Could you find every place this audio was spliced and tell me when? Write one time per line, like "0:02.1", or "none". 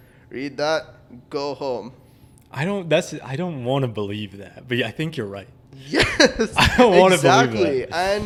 none